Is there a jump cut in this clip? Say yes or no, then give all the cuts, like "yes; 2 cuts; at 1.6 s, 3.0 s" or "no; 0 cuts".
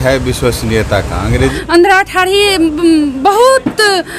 yes; 1 cut; at 1.5 s